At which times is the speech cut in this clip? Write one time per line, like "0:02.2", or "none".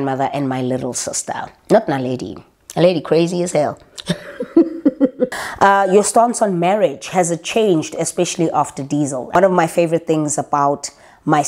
0:05.4
0:09.4